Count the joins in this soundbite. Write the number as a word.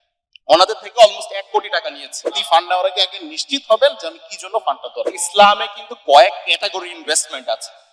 two